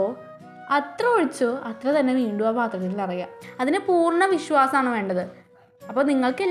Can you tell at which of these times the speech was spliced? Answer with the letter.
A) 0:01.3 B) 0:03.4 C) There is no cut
B